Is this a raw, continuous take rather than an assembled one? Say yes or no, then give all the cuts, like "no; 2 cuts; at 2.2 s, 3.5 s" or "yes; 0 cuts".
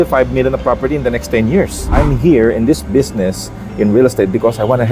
no; 1 cut; at 1.9 s